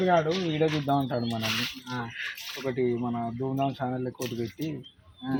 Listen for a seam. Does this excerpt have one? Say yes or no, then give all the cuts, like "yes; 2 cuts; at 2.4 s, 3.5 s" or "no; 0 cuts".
no; 0 cuts